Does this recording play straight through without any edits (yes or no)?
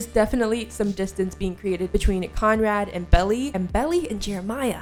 yes